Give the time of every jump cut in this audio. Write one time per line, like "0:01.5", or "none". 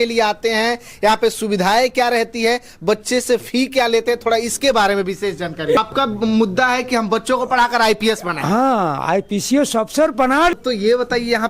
0:05.8
0:10.5